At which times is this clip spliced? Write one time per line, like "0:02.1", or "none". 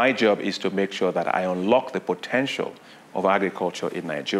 none